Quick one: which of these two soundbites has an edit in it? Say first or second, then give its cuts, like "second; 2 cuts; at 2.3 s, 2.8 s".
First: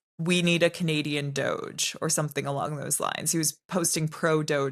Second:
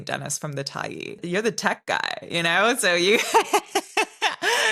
second; 1 cut; at 1.2 s